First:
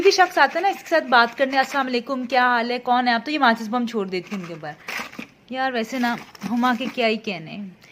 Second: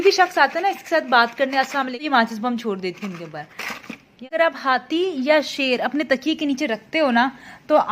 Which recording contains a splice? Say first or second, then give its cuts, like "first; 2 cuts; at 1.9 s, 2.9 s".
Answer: second; 2 cuts; at 2.0 s, 4.2 s